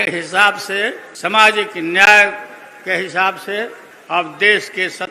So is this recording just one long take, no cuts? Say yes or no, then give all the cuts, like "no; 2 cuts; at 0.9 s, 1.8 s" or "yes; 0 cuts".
no; 2 cuts; at 1.1 s, 3.9 s